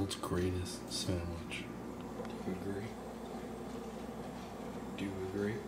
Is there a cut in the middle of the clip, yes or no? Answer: no